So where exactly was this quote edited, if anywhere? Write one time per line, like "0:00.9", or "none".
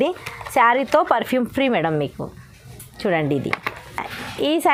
none